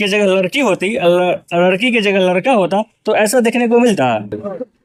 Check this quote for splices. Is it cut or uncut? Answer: uncut